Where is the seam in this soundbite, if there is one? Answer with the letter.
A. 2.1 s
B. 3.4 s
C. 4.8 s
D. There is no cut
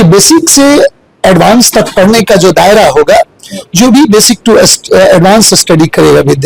D